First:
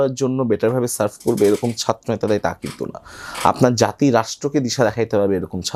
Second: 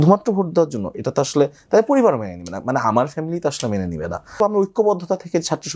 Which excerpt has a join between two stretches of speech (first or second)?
second